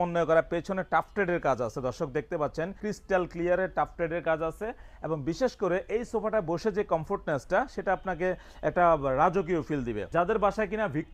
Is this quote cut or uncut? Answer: uncut